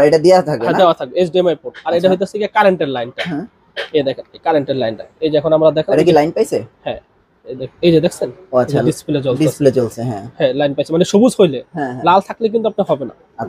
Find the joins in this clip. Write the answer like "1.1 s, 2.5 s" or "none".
none